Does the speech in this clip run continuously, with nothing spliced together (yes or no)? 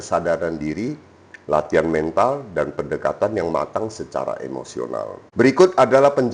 no